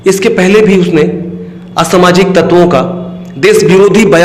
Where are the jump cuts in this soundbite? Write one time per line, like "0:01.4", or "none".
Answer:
none